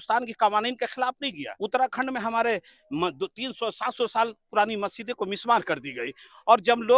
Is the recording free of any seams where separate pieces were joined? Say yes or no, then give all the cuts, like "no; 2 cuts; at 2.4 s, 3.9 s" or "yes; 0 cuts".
no; 1 cut; at 1.5 s